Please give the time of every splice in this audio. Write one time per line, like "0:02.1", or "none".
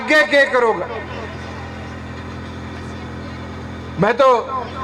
none